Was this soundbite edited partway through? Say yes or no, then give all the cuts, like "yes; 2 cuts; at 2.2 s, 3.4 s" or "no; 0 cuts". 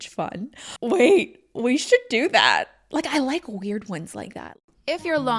yes; 1 cut; at 4.5 s